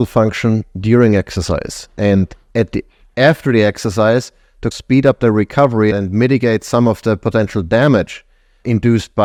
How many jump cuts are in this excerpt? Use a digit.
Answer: 0